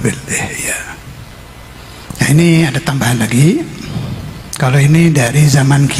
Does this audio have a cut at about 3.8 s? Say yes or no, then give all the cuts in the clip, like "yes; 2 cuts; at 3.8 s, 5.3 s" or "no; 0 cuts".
no; 1 cut; at 1.8 s